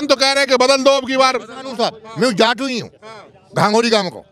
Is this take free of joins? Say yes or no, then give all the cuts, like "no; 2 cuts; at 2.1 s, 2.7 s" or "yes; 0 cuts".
yes; 0 cuts